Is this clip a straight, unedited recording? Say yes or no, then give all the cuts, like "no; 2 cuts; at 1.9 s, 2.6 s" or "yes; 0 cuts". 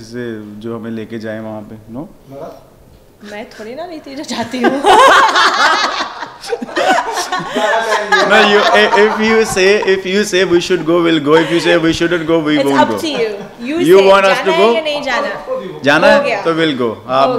yes; 0 cuts